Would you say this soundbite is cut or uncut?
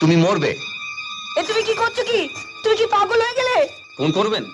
uncut